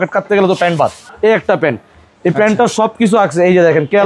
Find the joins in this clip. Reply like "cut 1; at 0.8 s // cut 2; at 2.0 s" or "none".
cut 1; at 1.0 s